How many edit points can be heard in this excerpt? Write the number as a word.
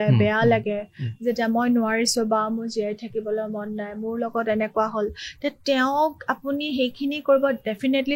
zero